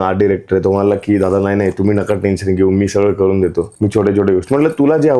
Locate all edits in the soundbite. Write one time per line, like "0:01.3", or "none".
0:03.7